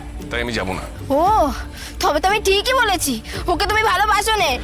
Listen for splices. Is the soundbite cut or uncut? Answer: uncut